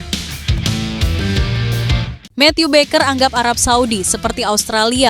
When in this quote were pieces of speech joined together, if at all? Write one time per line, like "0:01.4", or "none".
0:02.2